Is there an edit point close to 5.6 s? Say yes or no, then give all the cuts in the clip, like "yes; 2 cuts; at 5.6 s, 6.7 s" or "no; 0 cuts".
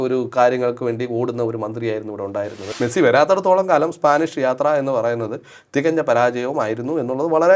no; 1 cut; at 2.6 s